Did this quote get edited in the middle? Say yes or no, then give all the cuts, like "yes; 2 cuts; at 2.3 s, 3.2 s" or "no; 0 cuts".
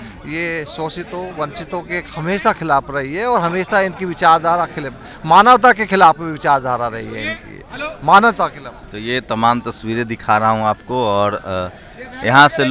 no; 0 cuts